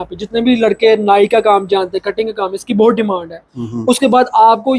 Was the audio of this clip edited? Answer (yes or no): no